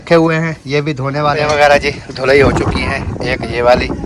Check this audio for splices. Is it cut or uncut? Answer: cut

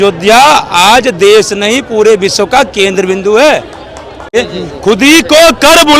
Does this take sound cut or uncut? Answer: cut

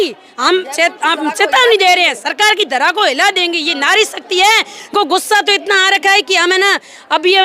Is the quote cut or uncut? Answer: cut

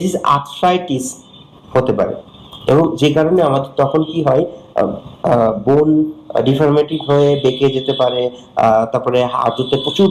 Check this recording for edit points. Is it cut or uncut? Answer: uncut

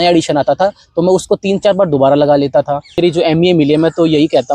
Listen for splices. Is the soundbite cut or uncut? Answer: cut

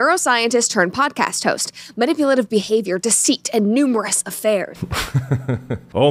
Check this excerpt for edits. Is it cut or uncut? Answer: cut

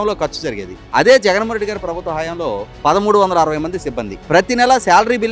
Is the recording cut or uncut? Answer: uncut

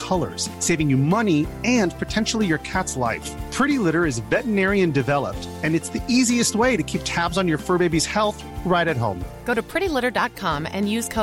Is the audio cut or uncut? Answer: uncut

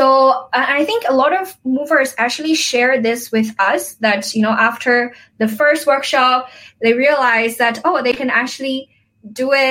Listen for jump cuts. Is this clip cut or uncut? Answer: uncut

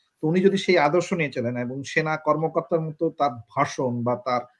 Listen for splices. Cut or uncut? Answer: uncut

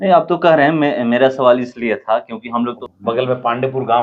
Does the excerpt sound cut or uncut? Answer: cut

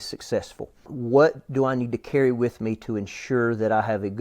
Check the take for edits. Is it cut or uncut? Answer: cut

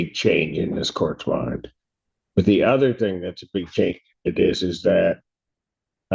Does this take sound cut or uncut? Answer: uncut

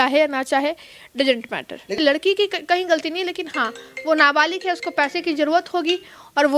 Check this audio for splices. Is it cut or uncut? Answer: cut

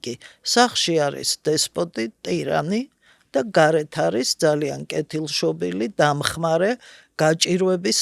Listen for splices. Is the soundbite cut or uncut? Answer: uncut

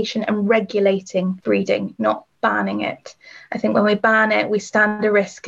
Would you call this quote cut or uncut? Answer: cut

